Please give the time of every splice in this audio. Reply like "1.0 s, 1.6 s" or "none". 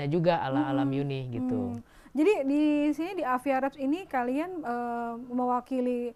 none

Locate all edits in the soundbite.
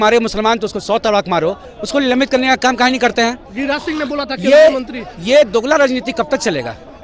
none

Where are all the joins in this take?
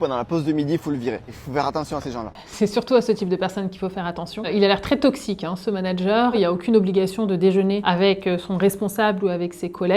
1.3 s, 2.4 s, 6.3 s, 7.8 s

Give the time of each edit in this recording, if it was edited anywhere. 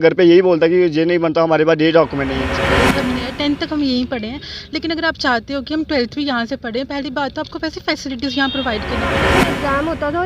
2.6 s, 9.2 s

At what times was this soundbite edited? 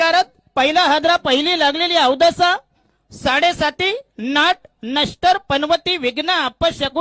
none

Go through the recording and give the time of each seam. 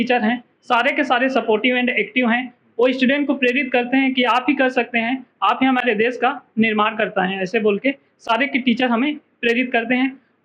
none

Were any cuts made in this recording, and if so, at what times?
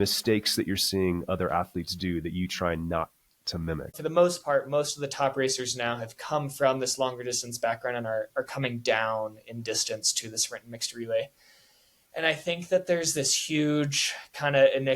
4.0 s

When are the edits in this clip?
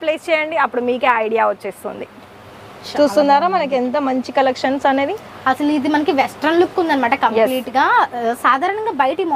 none

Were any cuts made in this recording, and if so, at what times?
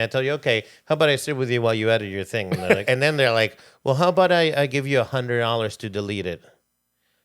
2.8 s

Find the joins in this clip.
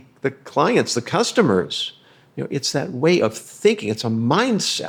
none

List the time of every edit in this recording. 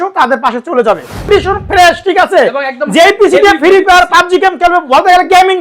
1.3 s

